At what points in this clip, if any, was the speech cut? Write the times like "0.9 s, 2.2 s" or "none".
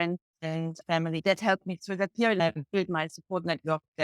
1.2 s, 2.4 s